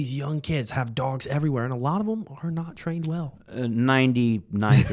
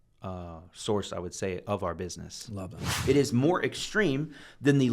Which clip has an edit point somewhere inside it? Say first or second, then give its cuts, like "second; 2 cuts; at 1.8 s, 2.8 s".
second; 1 cut; at 2.9 s